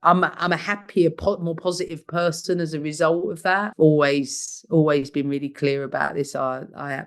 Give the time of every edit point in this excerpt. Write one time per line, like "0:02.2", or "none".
0:03.7